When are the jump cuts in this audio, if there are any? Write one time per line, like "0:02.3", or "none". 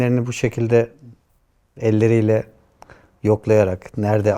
none